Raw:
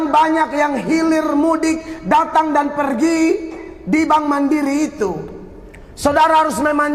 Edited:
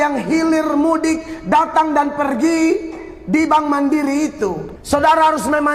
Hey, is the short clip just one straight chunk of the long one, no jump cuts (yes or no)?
no